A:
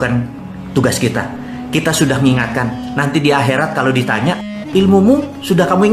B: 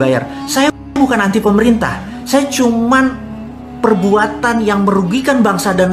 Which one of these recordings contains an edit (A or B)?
A